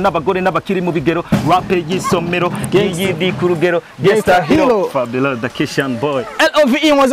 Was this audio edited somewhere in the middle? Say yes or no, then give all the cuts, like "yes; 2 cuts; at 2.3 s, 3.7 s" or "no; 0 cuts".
no; 0 cuts